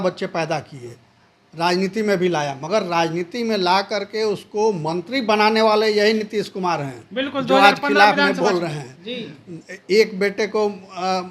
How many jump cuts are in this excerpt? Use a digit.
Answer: 0